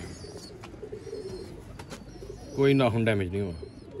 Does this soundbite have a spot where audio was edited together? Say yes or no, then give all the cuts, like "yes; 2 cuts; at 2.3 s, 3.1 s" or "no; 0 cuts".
no; 0 cuts